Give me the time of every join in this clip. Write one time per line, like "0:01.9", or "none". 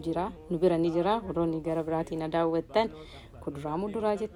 none

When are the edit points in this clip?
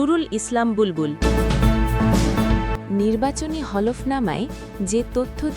0:01.1

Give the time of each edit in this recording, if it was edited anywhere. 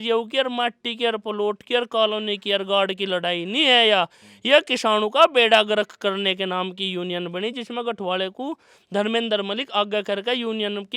none

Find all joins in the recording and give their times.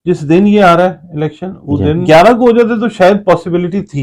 0:02.0

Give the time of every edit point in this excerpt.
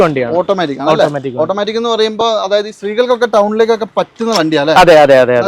none

